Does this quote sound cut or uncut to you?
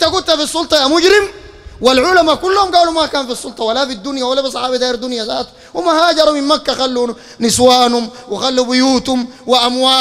uncut